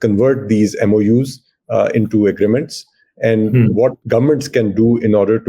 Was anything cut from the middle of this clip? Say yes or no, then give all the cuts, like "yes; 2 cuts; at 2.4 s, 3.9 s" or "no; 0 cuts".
yes; 1 cut; at 4.0 s